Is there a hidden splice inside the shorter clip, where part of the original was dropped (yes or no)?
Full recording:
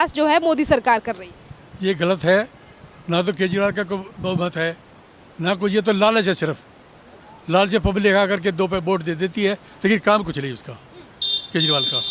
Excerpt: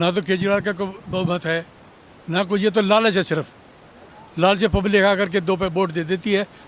no